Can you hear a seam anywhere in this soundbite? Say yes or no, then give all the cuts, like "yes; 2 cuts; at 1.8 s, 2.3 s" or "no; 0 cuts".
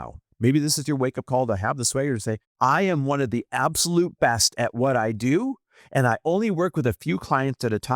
yes; 1 cut; at 2.5 s